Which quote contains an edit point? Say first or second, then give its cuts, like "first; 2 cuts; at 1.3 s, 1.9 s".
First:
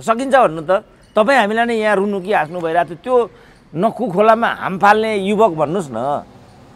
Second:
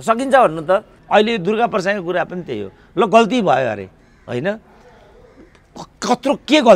second; 1 cut; at 0.9 s